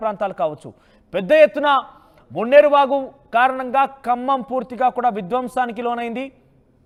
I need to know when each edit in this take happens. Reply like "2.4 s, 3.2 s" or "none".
none